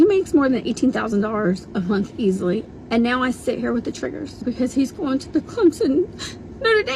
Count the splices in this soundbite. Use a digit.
3